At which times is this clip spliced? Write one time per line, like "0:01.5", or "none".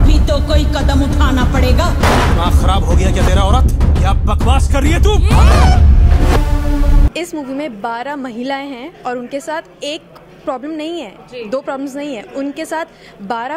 0:07.1